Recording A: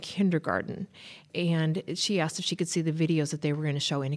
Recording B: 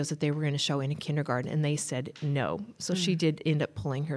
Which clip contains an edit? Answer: A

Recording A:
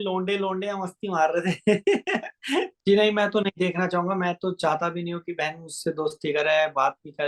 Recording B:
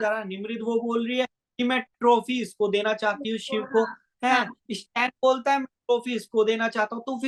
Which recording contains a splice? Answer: A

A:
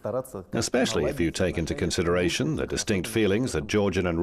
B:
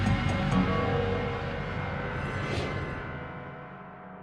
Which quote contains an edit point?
B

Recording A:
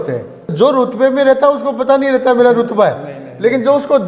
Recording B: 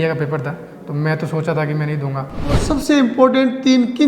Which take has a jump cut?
B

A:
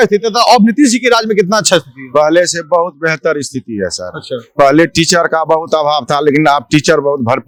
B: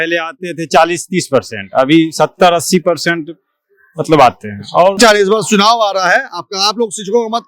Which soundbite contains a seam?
B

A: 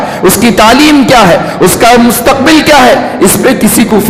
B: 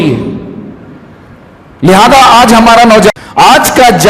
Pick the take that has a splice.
B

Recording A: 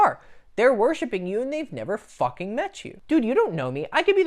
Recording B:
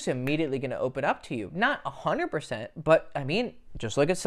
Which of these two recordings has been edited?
A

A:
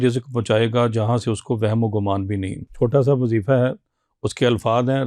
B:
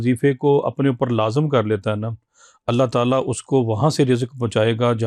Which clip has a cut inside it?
A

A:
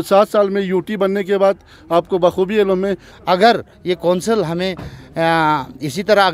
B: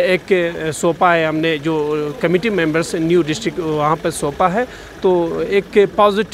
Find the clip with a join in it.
A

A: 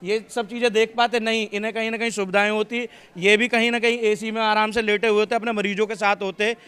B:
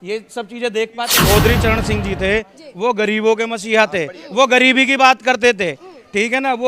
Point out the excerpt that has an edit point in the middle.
B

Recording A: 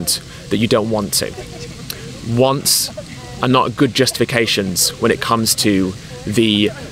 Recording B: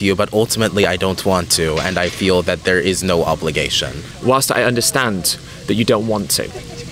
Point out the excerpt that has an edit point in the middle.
B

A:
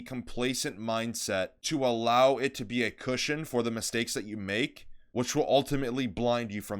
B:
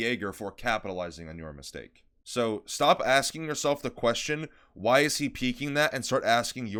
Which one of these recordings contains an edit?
A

